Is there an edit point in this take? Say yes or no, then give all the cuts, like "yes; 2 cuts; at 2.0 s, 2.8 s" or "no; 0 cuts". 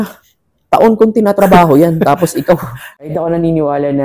yes; 1 cut; at 2.9 s